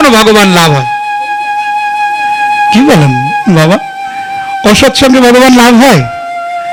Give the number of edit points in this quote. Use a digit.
0